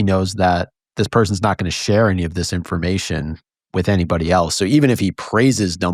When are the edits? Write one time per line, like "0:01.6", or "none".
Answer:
none

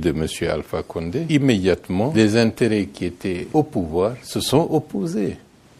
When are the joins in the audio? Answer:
0:01.2
0:01.9
0:03.4
0:04.3

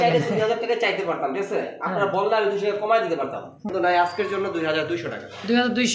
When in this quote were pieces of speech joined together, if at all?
0:03.7

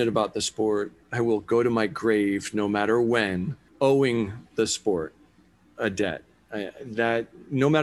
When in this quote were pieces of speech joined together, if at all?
0:01.0
0:03.6

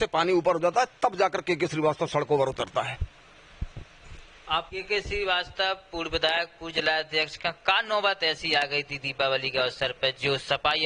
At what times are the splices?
0:04.7

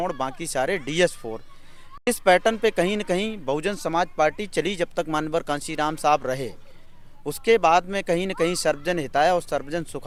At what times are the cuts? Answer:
none

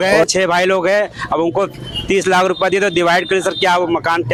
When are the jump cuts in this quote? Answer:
none

